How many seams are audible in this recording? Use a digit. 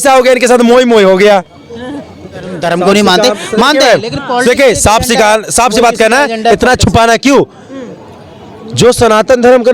1